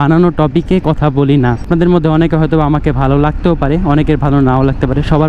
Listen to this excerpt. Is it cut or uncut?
cut